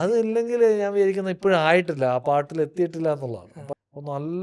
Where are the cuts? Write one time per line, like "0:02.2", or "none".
0:03.5